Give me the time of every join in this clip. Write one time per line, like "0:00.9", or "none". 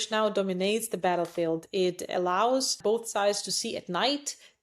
0:02.8